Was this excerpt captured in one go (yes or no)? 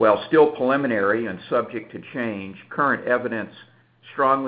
no